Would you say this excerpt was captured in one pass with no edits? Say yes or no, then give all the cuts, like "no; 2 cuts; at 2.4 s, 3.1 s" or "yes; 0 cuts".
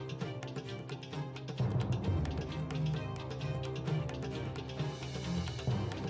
yes; 0 cuts